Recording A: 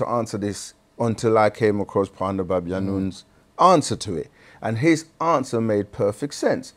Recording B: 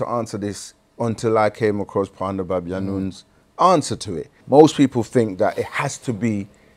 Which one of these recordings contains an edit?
B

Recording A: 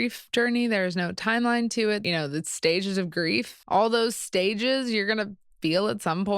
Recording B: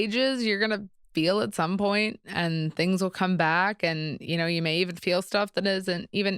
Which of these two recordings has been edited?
A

